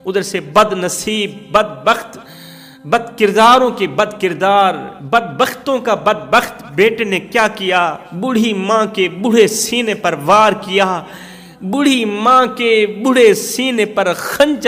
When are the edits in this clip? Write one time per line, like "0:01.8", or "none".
none